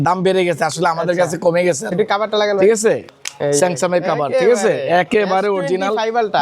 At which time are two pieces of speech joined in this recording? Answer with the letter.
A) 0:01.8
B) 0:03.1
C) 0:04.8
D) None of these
B